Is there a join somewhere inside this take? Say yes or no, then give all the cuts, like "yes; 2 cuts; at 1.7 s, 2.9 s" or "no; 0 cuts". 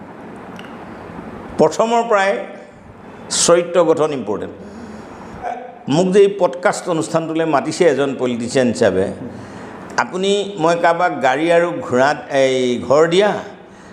yes; 1 cut; at 5.5 s